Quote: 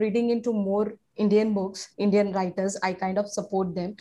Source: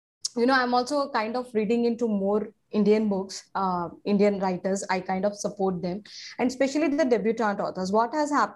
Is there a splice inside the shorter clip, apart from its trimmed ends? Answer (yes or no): yes